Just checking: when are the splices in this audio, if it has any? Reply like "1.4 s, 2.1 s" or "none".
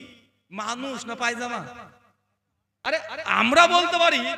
2.9 s